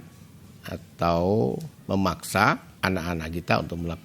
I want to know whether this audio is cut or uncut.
cut